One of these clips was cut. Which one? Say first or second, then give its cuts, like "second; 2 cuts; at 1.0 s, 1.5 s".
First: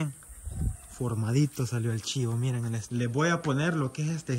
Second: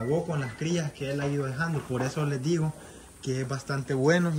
first; 1 cut; at 2.8 s